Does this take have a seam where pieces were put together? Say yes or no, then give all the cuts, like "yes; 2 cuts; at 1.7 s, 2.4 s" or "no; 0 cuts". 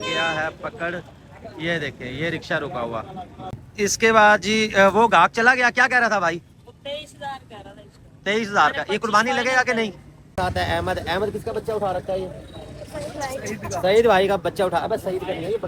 yes; 2 cuts; at 3.6 s, 10.4 s